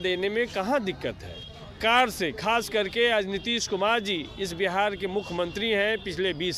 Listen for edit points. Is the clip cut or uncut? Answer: cut